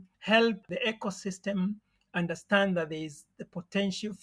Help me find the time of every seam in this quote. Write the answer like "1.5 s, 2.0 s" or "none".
none